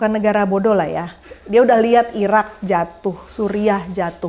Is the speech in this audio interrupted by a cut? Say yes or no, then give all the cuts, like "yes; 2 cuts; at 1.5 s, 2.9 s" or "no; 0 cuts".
no; 0 cuts